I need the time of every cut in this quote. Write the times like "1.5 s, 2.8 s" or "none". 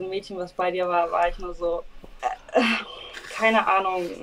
none